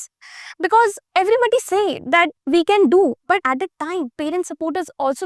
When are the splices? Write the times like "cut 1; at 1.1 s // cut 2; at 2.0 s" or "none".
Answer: cut 1; at 1.0 s // cut 2; at 2.4 s // cut 3; at 3.4 s